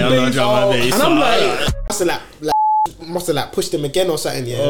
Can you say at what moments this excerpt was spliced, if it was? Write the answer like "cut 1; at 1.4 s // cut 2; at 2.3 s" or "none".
cut 1; at 1.7 s